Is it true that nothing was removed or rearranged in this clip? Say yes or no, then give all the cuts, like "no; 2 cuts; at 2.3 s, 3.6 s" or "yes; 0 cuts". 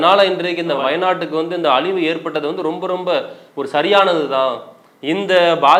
yes; 0 cuts